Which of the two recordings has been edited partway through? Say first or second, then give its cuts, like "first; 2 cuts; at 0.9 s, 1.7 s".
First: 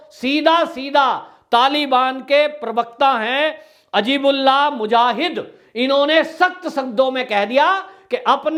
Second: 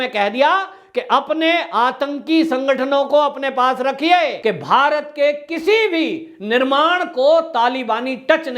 second; 1 cut; at 4.4 s